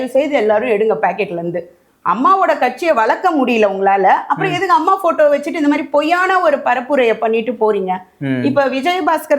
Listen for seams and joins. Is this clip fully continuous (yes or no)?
yes